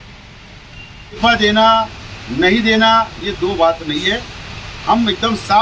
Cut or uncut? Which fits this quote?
cut